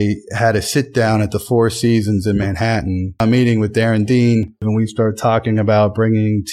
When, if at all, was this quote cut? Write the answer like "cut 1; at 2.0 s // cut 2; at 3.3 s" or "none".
cut 1; at 3.2 s // cut 2; at 4.7 s